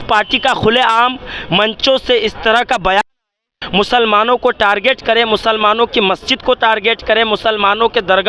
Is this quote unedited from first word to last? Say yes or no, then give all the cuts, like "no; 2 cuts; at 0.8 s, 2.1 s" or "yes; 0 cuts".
yes; 0 cuts